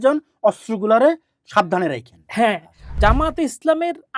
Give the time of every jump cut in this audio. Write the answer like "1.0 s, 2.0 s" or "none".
2.9 s